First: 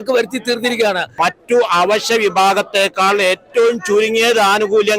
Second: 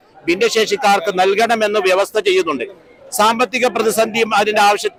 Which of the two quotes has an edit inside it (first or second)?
first